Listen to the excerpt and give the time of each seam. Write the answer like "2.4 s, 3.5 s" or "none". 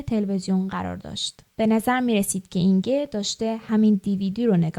3.7 s